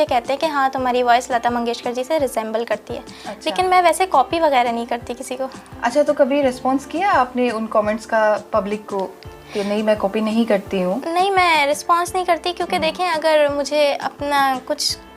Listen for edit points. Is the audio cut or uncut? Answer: uncut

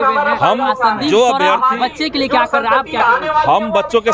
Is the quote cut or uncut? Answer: uncut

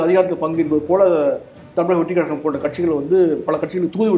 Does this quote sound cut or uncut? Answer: uncut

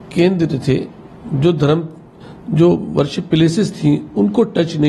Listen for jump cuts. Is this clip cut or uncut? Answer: uncut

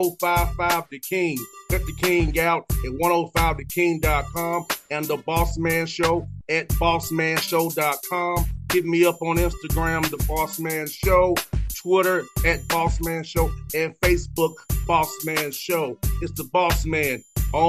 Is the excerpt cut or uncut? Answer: uncut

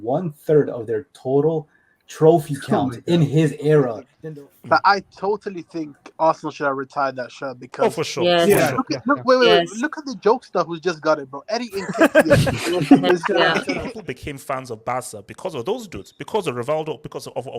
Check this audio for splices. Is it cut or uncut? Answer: cut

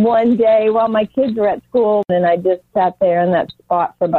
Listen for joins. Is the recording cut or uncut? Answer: cut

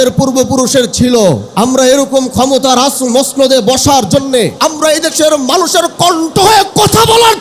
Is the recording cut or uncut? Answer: cut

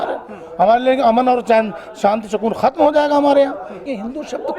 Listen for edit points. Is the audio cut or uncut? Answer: cut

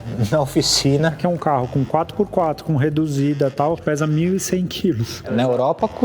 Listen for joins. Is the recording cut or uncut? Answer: cut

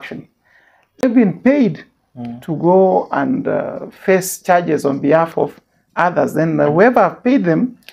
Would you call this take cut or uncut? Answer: cut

